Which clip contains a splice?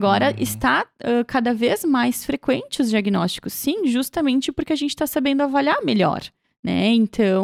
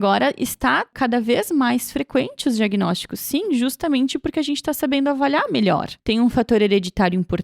second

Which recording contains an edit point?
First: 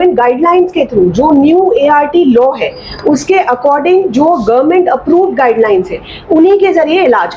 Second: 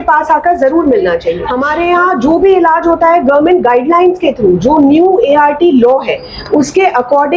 second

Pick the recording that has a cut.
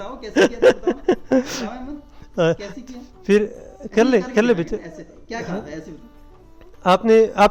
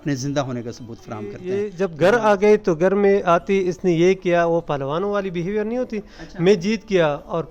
second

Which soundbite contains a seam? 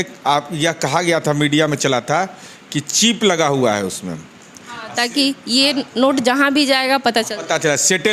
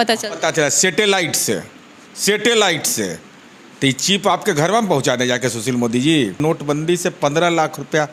second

